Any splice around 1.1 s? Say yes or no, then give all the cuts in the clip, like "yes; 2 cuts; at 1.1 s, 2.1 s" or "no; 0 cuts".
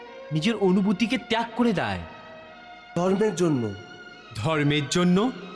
no; 1 cut; at 2.9 s